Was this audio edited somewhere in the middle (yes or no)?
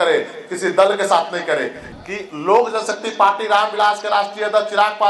yes